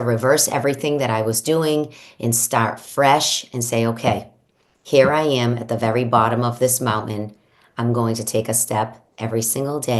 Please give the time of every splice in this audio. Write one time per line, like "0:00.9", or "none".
none